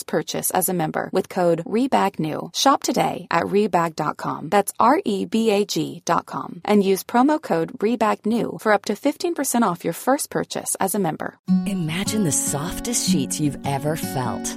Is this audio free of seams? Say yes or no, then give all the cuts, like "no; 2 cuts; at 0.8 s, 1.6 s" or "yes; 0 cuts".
no; 1 cut; at 11.3 s